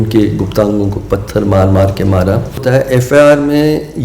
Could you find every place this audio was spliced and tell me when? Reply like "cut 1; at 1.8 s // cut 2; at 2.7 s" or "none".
cut 1; at 2.6 s

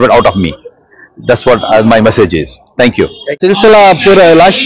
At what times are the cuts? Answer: cut 1; at 3.4 s

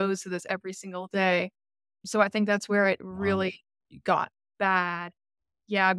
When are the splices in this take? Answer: cut 1; at 2.0 s

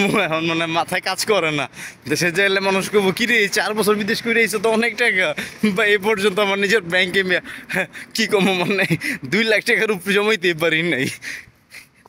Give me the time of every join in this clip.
none

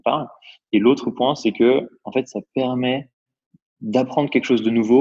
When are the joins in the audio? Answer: none

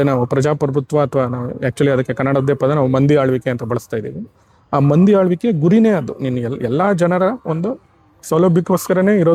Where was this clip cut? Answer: none

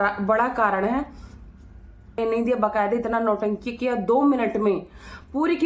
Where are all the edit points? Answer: cut 1; at 2.2 s

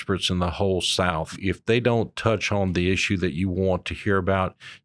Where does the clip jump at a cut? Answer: cut 1; at 1.4 s

